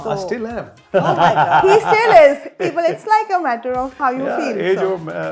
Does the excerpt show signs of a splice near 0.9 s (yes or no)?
no